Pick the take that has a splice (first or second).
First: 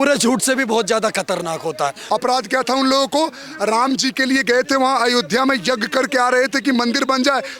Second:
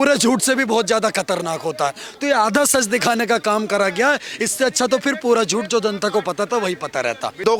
first